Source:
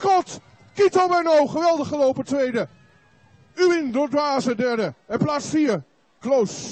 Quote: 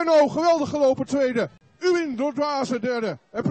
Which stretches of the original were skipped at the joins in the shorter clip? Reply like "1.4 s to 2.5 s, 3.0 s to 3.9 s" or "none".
2.8 s to 3.4 s